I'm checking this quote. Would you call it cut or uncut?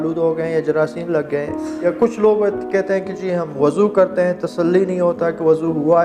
cut